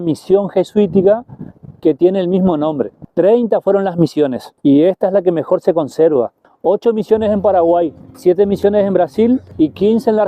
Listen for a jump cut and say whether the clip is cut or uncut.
cut